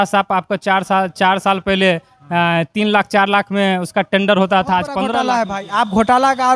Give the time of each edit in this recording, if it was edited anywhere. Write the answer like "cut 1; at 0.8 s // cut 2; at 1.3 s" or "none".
cut 1; at 5.2 s